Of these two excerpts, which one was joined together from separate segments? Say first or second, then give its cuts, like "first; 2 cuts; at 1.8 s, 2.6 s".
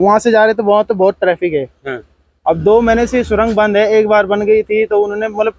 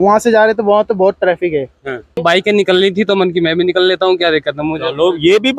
second; 1 cut; at 2.2 s